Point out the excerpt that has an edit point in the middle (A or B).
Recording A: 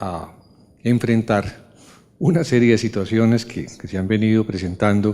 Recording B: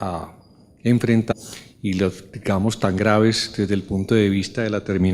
A